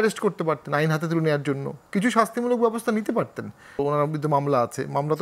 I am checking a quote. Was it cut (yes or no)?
yes